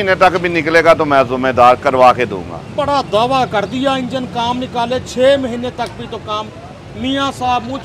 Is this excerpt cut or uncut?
uncut